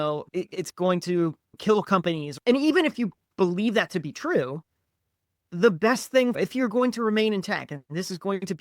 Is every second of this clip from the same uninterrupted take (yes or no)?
no